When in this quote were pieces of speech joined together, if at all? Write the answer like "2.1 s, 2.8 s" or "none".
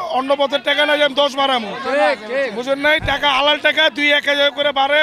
none